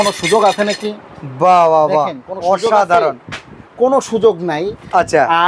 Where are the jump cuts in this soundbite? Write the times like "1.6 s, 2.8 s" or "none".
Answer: none